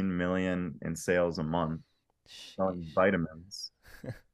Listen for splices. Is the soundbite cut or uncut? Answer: uncut